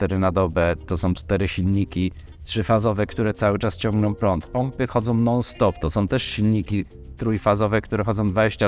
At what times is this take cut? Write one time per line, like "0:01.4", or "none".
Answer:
none

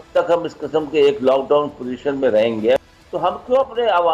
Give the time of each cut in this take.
0:02.8

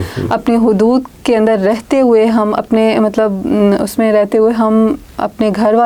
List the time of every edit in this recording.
none

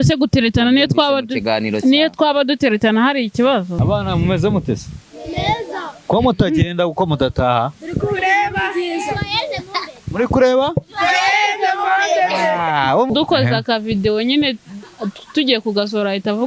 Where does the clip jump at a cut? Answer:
0:03.8
0:13.1

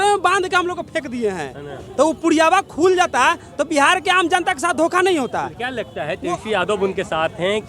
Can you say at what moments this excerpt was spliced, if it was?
none

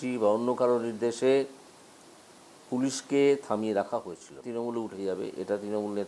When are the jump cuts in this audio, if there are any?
0:04.4

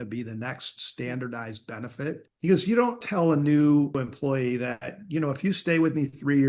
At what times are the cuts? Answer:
0:02.3
0:03.0
0:04.0

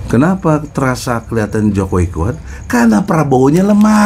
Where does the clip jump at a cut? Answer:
none

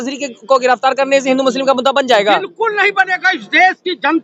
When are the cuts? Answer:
none

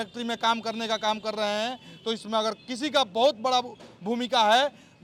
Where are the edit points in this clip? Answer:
none

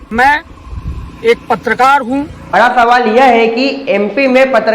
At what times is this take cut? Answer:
0:02.4

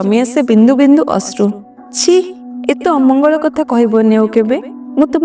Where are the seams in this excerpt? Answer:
0:02.4

